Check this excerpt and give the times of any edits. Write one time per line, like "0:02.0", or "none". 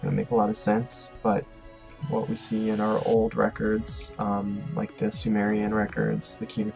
none